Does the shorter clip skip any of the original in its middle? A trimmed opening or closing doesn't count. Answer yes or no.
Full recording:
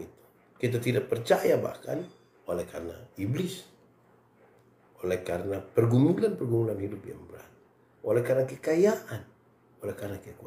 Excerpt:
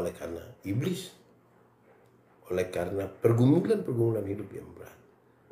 no